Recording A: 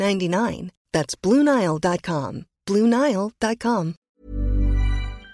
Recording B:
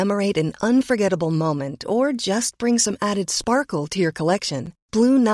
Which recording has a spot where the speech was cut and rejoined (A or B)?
A